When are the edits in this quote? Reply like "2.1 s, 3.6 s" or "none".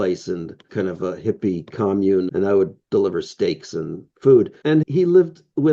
2.3 s

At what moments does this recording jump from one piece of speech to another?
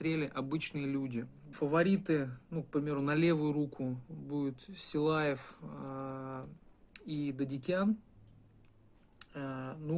1.4 s

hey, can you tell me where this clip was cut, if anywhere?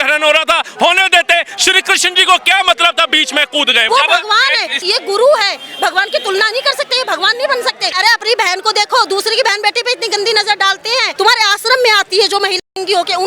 3.9 s, 4.8 s, 7.9 s, 11.1 s

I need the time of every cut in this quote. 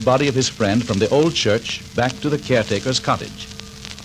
2.8 s

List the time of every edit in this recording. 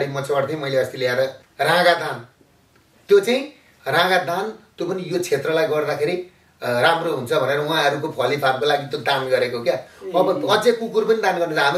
1.4 s

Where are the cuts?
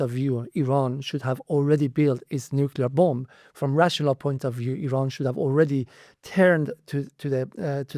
none

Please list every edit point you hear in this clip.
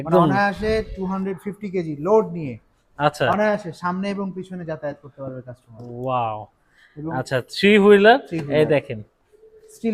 none

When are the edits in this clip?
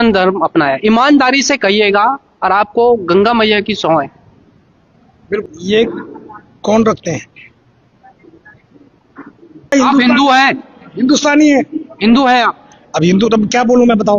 5.4 s, 9.7 s

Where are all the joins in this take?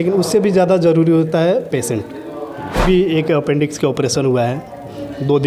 2.9 s

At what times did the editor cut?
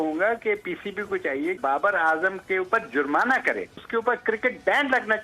1.6 s, 3.8 s

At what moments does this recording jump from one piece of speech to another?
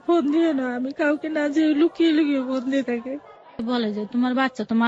3.6 s

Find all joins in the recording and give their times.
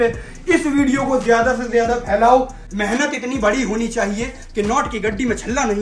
2.6 s

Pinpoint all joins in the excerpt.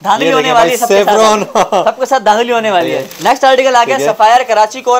3.0 s

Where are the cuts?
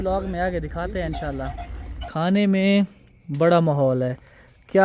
2.0 s

